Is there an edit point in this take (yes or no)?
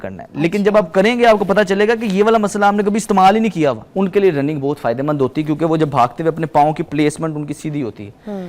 yes